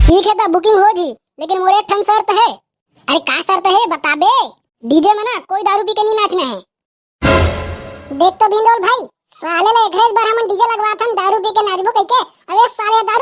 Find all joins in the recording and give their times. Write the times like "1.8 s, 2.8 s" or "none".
none